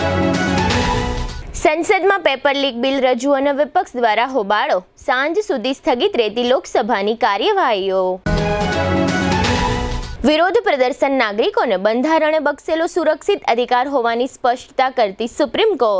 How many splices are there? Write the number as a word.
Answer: one